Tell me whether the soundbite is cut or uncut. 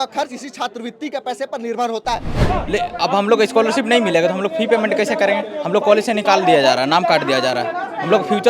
cut